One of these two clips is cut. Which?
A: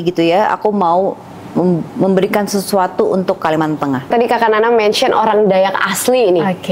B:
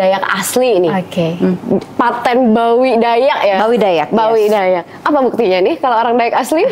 A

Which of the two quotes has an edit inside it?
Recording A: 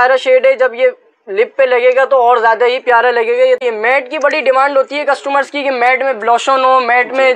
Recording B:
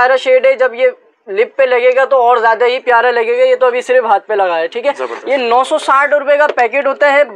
A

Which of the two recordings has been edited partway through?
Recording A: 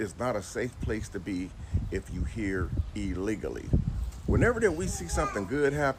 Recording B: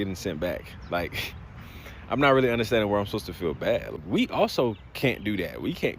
B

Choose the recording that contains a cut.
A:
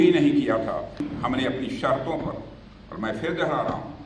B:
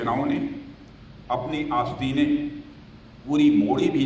A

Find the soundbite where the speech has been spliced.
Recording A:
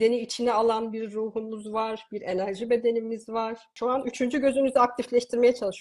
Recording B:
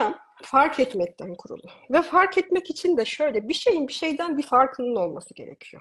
A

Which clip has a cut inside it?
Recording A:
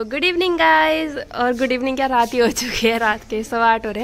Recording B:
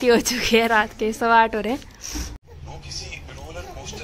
B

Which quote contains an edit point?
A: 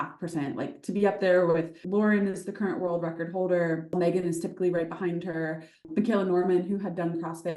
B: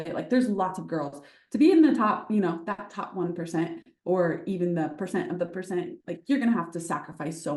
A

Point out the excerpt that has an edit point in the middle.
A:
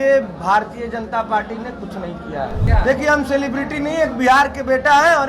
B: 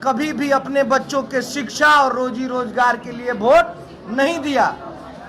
A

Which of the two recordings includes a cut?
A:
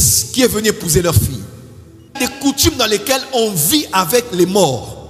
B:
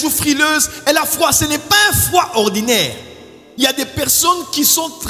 A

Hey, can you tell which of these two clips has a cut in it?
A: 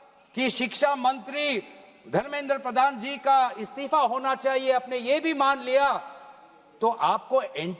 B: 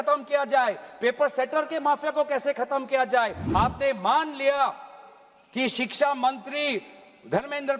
B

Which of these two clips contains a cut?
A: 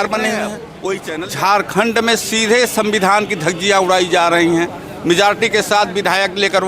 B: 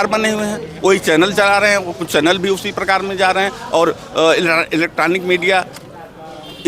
A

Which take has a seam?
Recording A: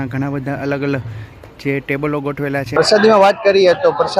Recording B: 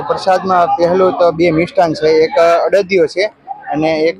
A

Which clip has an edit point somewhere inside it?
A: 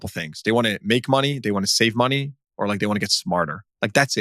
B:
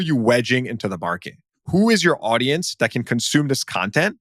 B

